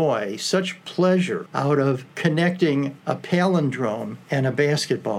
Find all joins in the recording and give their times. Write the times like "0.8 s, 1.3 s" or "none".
1.7 s, 3.0 s, 4.1 s